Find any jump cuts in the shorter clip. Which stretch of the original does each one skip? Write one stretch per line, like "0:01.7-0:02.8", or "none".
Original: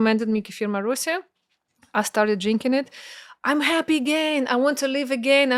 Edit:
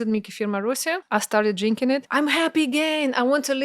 0:01.2-0:01.9
0:02.9-0:03.4